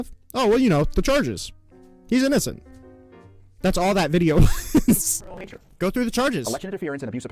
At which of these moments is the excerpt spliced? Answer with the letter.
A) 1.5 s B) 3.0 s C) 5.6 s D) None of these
C